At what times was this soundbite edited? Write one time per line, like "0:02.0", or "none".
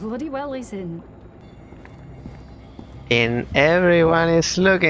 0:01.4